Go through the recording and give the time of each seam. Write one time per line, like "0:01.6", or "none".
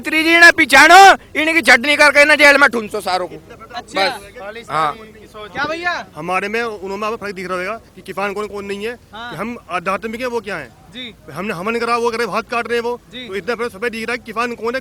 none